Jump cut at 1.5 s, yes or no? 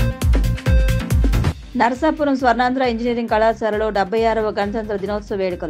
yes